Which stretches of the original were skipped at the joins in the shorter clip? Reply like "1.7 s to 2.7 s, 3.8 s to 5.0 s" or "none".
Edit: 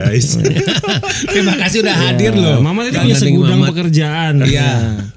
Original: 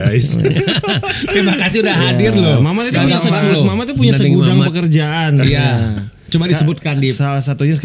3.0 s to 4.0 s